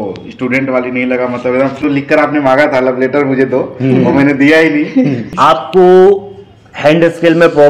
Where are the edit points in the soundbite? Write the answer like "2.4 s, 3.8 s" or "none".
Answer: 1.8 s, 5.3 s